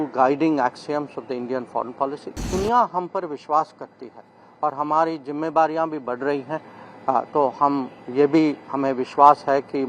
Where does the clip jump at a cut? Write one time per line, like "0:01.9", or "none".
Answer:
0:02.5